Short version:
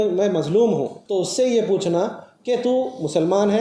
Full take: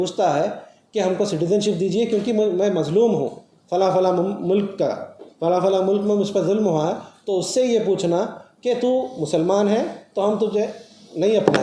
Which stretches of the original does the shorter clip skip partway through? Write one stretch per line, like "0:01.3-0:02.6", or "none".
0:03.4-0:07.1